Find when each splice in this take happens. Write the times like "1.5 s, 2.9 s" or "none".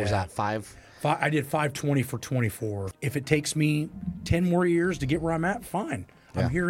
2.8 s